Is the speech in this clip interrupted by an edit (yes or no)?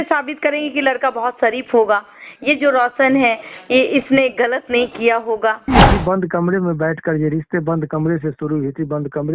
yes